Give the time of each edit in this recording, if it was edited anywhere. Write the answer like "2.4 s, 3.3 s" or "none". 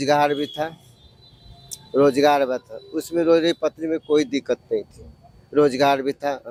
none